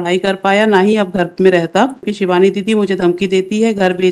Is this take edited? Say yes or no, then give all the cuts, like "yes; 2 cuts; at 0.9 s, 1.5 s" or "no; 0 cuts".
yes; 1 cut; at 2.1 s